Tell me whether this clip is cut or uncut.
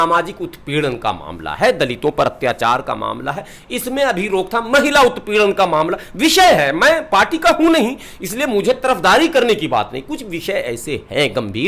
uncut